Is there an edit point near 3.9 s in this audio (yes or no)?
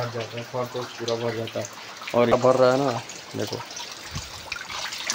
no